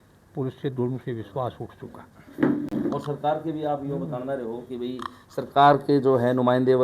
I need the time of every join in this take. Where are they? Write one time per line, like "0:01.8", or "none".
none